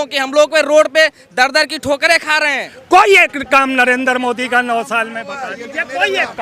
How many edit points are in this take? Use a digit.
1